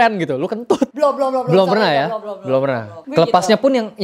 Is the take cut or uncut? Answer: cut